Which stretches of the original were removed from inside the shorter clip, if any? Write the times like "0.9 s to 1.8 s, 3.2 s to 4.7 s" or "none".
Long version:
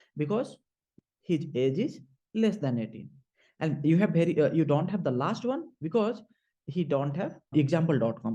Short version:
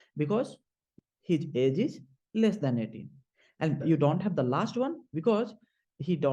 3.8 s to 4.5 s